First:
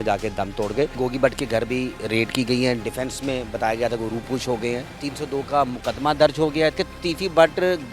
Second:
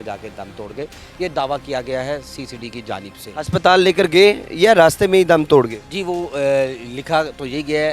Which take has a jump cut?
first; 3 cuts; at 1.0 s, 4.9 s, 6.8 s

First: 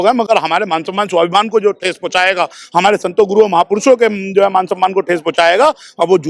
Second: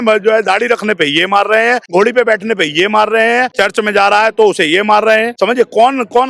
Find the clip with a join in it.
second; 3 cuts; at 1.8 s, 3.5 s, 5.3 s

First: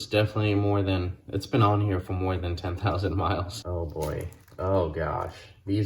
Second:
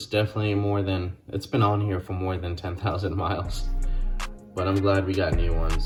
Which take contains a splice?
first; 1 cut; at 3.6 s

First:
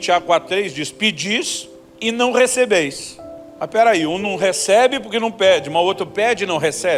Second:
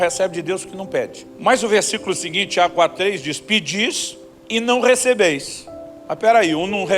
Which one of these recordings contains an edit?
second; 1 cut; at 1.2 s

